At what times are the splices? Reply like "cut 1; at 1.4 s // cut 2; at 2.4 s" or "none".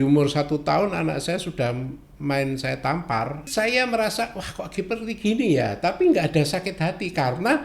cut 1; at 3.5 s